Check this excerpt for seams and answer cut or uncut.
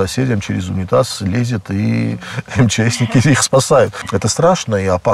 cut